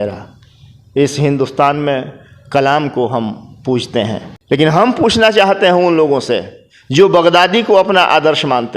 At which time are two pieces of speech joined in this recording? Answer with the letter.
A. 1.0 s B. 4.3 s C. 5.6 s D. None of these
B